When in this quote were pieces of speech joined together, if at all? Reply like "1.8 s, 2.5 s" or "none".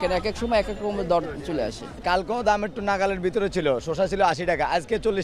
1.9 s